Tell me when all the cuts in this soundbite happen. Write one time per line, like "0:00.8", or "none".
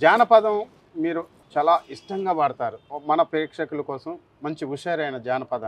0:01.3
0:02.9

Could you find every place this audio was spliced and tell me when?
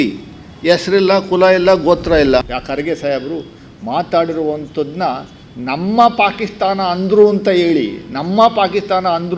0:02.4

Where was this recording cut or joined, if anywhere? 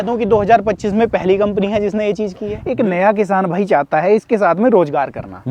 0:02.5

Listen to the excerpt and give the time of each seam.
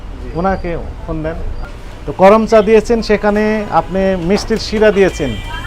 0:01.5

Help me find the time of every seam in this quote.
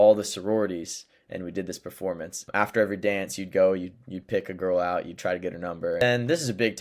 0:02.4
0:06.0

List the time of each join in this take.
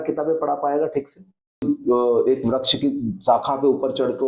0:01.6

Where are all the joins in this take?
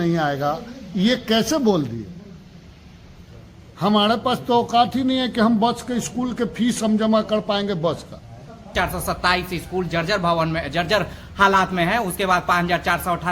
0:08.7

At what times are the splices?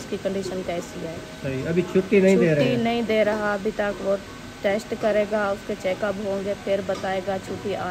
none

